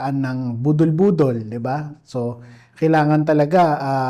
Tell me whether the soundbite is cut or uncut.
uncut